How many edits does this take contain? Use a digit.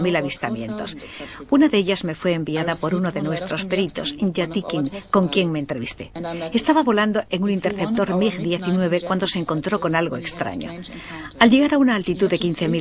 1